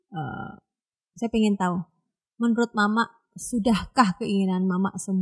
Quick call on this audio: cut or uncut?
uncut